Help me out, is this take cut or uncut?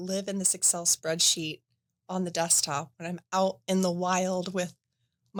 uncut